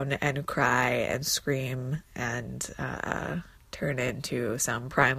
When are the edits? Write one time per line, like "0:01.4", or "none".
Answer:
0:03.6